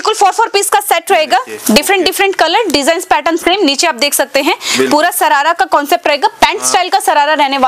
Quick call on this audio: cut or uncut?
uncut